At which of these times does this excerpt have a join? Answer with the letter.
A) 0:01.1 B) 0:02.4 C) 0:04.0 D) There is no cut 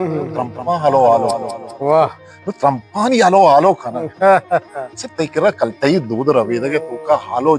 D